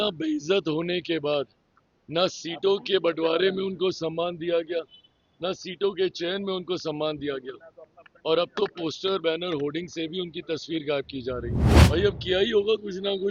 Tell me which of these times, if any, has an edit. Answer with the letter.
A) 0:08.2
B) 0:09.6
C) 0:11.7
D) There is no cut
C